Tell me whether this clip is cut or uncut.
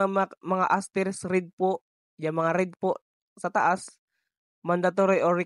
uncut